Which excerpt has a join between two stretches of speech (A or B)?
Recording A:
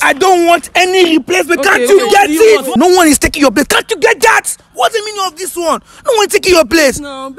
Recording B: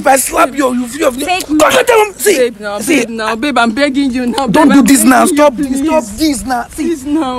A